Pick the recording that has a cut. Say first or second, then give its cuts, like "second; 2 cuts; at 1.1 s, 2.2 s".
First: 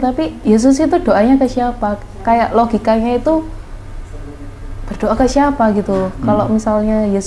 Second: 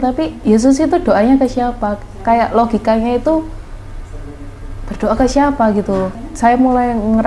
second; 1 cut; at 6.1 s